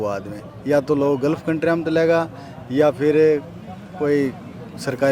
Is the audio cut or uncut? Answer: uncut